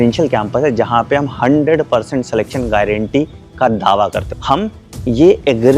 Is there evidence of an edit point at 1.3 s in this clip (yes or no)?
no